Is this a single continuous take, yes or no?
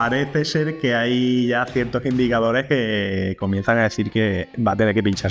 yes